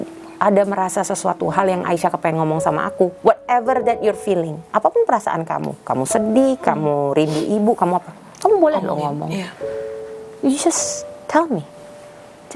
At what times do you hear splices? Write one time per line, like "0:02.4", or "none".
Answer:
none